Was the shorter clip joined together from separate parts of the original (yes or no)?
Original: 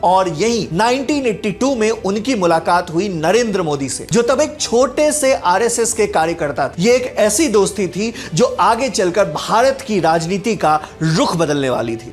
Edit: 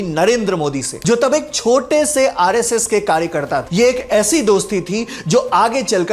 no